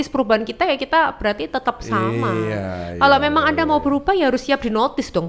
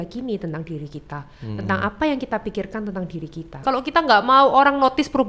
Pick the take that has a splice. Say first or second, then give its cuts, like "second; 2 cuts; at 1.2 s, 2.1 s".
second; 1 cut; at 3.6 s